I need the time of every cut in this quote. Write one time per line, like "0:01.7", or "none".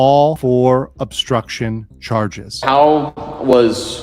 0:02.6